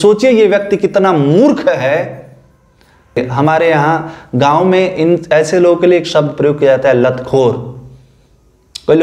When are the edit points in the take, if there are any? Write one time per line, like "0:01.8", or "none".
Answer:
0:03.2